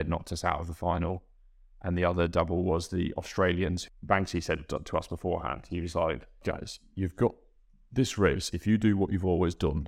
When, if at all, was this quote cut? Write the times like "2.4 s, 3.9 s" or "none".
3.8 s, 6.4 s